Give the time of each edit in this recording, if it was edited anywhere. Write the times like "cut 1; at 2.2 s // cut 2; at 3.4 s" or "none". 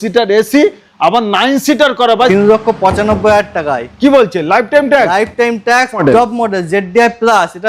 cut 1; at 2.3 s // cut 2; at 6.0 s